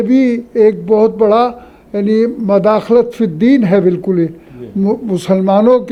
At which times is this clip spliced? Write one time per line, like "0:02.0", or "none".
none

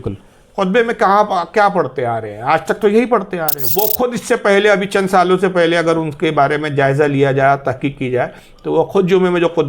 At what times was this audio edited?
0:03.6

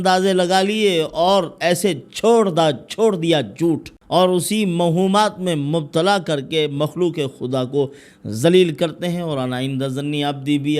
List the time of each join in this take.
0:03.9

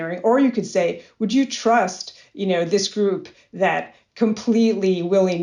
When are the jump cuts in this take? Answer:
none

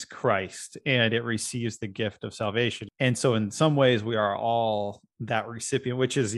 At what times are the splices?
0:02.8

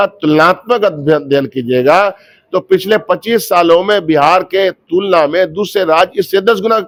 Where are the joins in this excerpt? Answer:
none

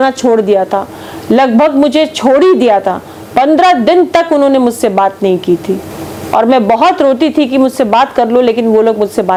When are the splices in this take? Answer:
none

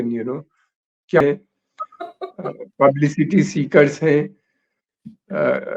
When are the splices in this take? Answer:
0:01.2

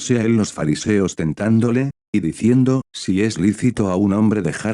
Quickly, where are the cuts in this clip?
0:02.9

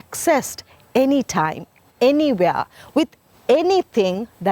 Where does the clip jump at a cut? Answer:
none

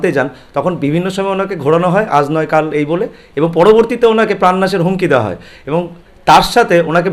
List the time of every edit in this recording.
none

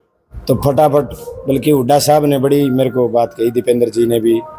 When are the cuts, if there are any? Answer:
none

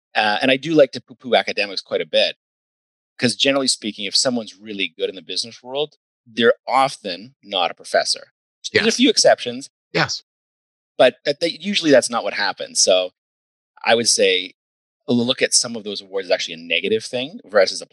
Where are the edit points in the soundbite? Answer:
0:13.5

